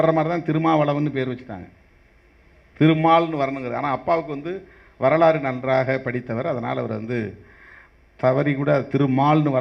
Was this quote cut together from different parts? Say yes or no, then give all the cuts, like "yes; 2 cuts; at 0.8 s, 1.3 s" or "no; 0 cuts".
no; 0 cuts